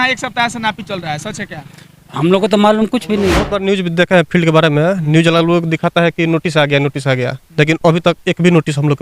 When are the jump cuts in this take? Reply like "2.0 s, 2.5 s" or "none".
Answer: 3.5 s